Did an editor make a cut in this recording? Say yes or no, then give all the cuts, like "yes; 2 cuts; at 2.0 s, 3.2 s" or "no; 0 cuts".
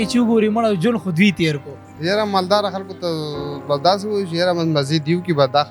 no; 0 cuts